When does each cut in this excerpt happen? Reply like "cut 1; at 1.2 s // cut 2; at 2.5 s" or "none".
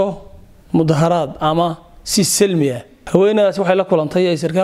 cut 1; at 2.9 s